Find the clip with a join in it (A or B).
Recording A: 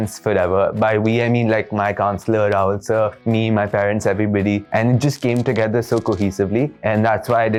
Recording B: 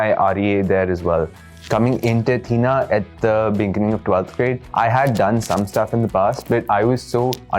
B